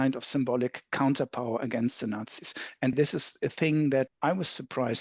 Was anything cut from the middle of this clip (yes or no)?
yes